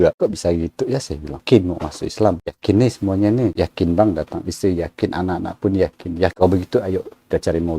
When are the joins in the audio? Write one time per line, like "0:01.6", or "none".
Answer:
0:01.4
0:02.4
0:06.3